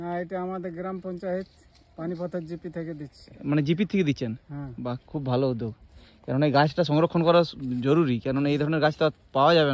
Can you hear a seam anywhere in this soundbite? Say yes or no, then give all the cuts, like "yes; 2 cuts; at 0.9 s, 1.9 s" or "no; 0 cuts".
no; 0 cuts